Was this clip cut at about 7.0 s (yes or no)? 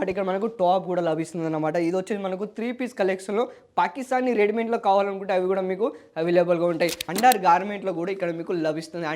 yes